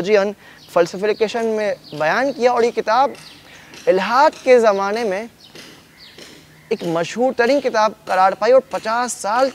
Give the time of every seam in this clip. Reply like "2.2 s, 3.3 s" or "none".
none